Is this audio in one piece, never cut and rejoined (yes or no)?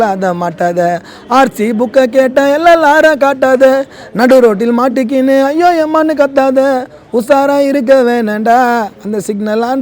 yes